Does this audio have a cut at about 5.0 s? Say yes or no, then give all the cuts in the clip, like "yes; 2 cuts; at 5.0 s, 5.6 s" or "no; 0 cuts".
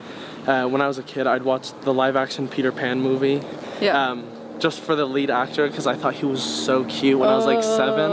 no; 0 cuts